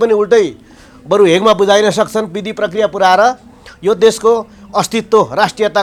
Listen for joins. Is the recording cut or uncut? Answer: uncut